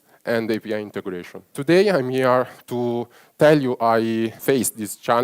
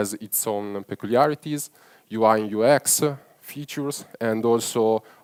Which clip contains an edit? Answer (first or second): first